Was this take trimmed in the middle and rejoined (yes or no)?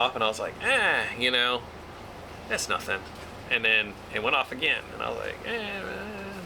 no